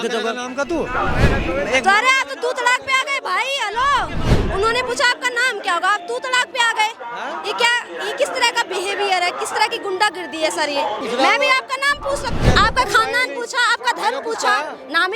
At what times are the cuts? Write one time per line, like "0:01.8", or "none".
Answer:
0:04.3
0:11.0
0:12.4